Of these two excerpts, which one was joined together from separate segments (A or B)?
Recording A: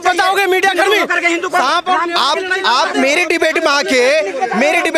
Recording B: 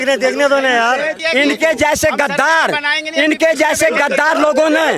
B